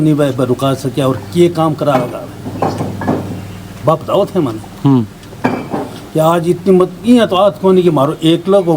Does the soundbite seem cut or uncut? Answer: uncut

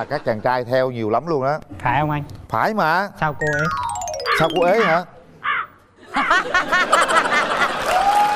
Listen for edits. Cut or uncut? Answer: uncut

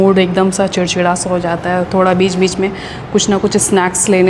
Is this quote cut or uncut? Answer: uncut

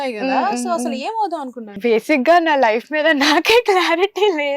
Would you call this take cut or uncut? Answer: cut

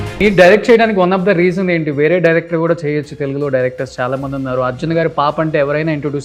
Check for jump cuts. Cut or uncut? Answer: uncut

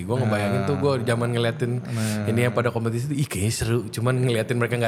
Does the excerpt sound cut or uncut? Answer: uncut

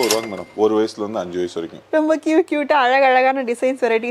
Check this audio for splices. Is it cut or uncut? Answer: cut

